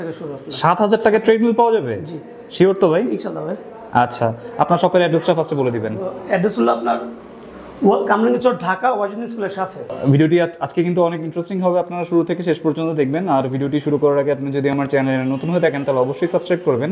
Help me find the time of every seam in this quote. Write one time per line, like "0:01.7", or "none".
none